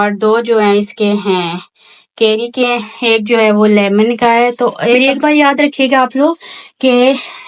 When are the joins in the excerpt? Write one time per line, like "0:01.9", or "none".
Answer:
0:05.0